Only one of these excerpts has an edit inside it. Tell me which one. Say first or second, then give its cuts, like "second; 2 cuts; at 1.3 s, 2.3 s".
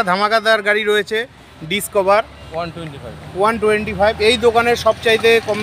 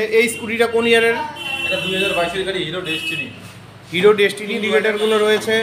second; 1 cut; at 4.5 s